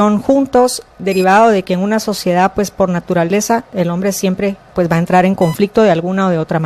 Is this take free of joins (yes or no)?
no